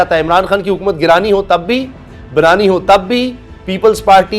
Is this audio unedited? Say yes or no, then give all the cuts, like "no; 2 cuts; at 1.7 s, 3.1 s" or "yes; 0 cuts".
yes; 0 cuts